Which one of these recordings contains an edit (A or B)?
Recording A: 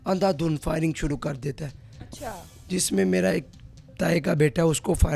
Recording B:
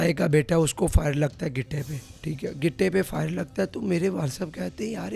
B